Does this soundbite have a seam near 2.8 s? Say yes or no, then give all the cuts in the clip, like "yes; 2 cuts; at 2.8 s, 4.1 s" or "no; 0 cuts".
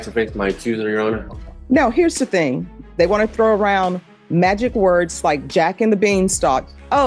yes; 1 cut; at 2.8 s